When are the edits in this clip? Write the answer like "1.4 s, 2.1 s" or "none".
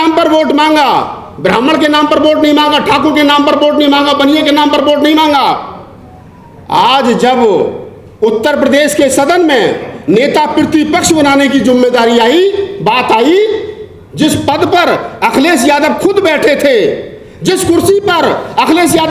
none